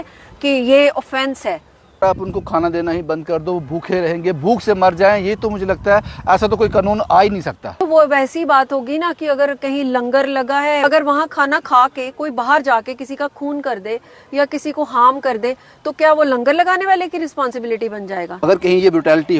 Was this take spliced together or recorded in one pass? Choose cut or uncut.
cut